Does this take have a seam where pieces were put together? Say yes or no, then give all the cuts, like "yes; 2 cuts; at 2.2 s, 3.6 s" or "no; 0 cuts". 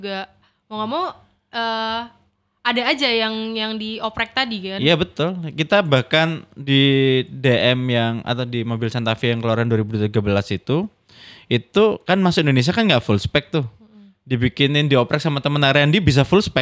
no; 0 cuts